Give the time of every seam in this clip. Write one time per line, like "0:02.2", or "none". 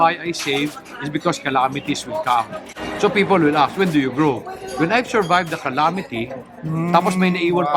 none